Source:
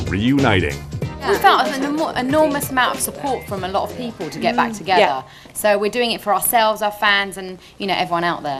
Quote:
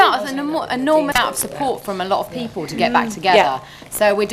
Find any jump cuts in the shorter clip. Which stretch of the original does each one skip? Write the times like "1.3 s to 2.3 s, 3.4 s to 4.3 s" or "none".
2.6 s to 2.8 s